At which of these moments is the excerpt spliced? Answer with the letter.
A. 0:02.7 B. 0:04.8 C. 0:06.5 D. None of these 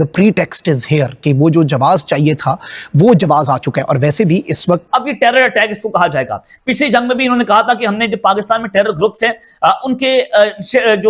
B